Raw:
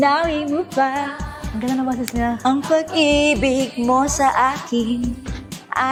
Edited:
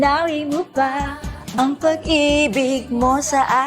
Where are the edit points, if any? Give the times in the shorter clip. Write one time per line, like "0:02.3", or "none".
0:01.5